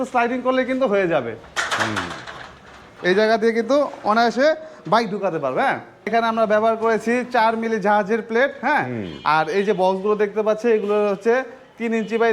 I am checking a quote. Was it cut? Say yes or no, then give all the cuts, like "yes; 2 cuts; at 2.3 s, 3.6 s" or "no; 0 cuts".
yes; 2 cuts; at 2.8 s, 6.1 s